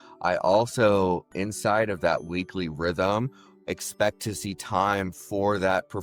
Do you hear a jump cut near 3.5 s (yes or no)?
no